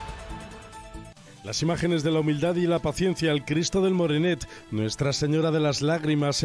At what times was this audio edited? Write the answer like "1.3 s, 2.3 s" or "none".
1.2 s